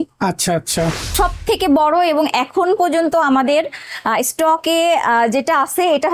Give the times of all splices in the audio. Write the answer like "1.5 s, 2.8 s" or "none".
1.0 s